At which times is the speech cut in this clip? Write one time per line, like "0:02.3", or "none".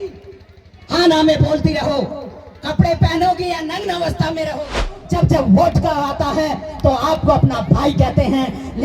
0:04.9